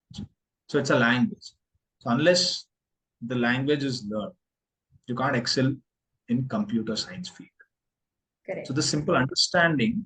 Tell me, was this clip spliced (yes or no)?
no